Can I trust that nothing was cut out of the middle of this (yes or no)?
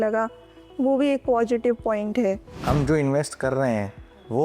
no